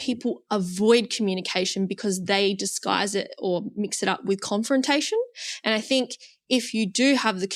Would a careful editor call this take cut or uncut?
uncut